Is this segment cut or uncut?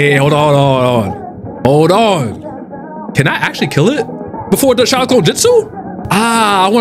uncut